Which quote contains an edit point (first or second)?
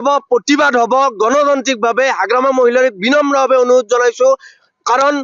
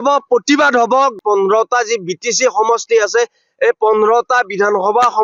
second